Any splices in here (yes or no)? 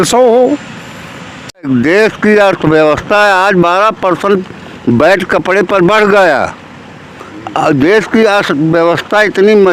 yes